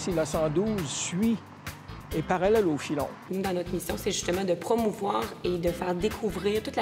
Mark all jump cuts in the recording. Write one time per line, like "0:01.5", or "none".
0:03.2